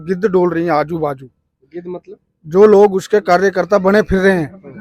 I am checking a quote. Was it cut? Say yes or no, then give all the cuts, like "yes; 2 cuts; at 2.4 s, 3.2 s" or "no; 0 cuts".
no; 0 cuts